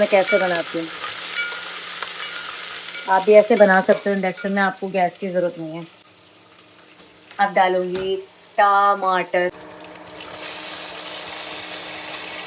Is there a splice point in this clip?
no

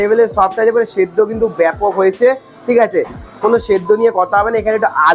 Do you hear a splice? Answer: no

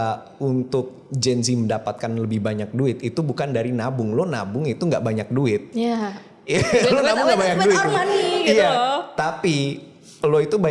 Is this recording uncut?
yes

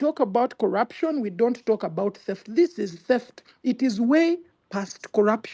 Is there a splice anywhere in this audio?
no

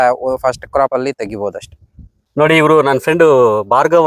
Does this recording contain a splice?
yes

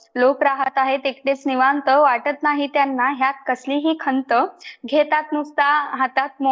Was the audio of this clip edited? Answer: no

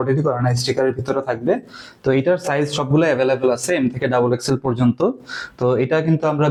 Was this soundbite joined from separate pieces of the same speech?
no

